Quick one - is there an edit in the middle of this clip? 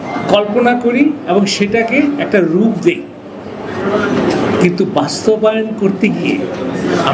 no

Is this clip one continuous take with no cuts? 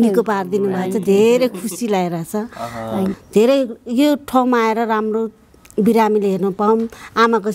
no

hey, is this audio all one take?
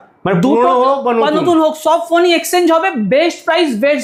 yes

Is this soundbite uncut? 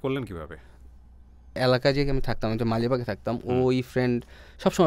yes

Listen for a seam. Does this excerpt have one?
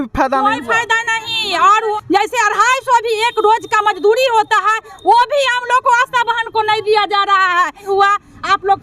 yes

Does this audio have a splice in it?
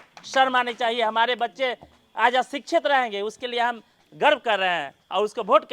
no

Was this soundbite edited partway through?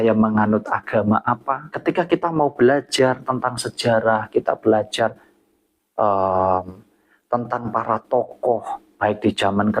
yes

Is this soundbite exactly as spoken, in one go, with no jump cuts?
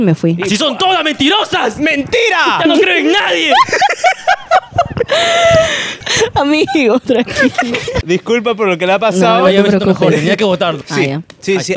no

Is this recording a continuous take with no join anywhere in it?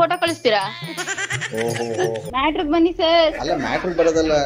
no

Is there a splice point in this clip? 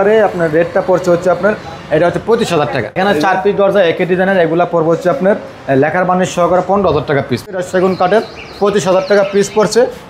yes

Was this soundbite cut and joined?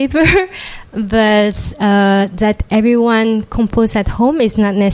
no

